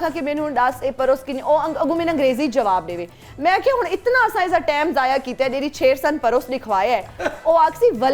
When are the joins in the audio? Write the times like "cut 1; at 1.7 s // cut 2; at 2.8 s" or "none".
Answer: none

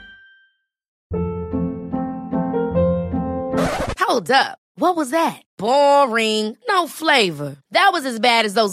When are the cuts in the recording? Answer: cut 1; at 0.9 s

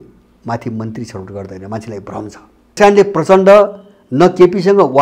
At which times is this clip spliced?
cut 1; at 2.8 s

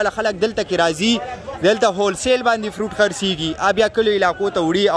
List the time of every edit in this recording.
none

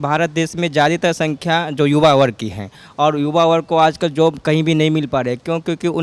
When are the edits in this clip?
none

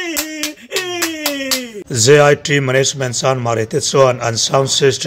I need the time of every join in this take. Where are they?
cut 1; at 1.8 s

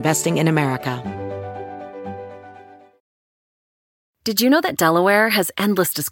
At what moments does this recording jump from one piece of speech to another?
cut 1; at 1.0 s

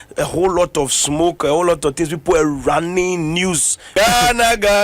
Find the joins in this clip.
cut 1; at 3.7 s

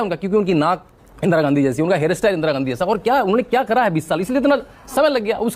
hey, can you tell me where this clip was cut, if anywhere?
none

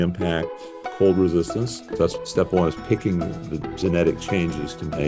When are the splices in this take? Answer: cut 1; at 2.2 s

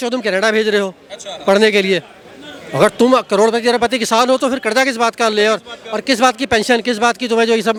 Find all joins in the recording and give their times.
none

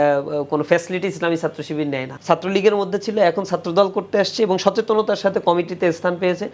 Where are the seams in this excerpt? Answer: cut 1; at 2.1 s

